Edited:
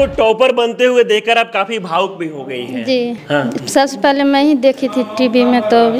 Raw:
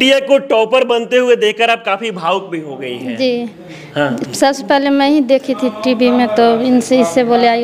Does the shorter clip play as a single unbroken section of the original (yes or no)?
no